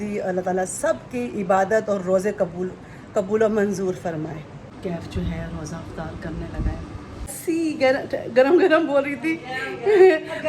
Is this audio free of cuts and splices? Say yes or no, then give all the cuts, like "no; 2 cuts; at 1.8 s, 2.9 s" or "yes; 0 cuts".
no; 2 cuts; at 4.5 s, 7.4 s